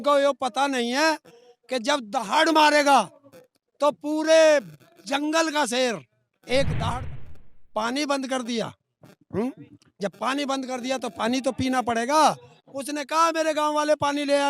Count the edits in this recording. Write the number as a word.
one